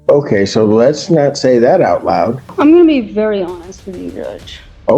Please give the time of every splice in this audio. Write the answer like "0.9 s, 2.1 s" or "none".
2.5 s